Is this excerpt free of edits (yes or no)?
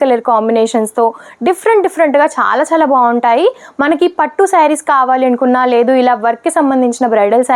yes